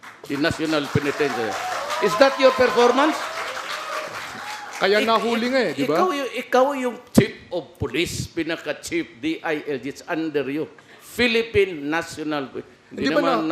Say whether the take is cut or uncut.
uncut